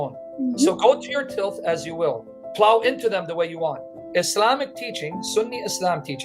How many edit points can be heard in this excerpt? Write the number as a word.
two